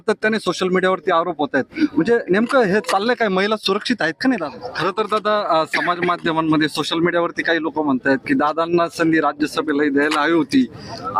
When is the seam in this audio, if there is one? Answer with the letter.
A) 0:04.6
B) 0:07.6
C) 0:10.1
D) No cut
A